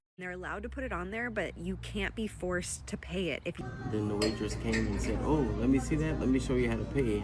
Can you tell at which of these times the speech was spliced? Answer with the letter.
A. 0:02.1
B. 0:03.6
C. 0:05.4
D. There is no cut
B